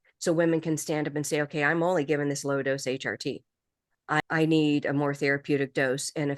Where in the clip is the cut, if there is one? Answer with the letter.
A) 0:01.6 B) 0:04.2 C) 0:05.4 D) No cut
B